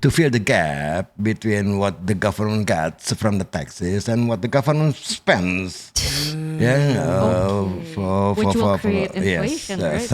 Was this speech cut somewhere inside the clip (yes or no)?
no